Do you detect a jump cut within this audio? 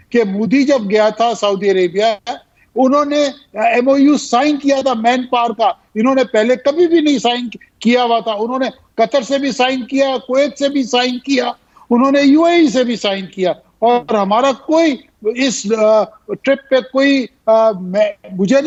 no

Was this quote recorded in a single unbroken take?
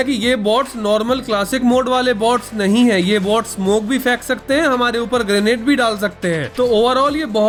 yes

